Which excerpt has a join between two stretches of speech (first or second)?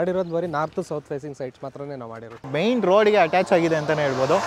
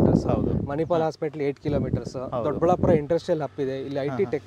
first